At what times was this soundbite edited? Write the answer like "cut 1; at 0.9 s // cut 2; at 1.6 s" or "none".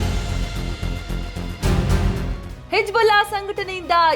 cut 1; at 2.3 s